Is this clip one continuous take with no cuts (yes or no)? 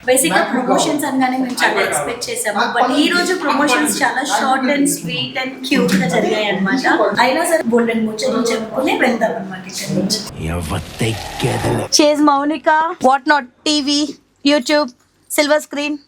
no